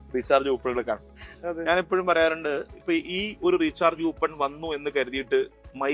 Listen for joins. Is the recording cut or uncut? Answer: uncut